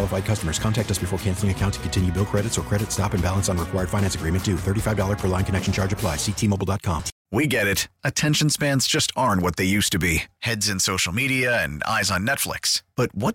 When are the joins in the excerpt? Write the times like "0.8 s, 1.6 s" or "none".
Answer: 7.1 s